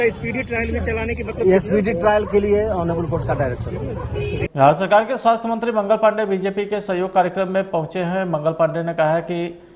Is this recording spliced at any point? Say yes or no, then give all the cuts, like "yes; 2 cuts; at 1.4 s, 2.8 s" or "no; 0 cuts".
yes; 1 cut; at 4.5 s